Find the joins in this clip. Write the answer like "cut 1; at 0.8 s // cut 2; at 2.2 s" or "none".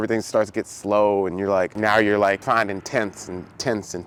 none